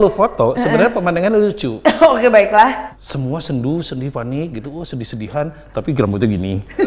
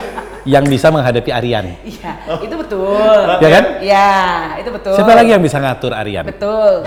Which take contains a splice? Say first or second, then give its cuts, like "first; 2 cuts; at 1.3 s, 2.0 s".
first; 1 cut; at 2.8 s